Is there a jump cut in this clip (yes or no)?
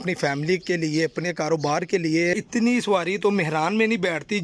yes